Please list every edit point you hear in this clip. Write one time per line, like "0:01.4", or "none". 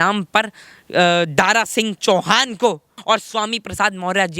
0:02.9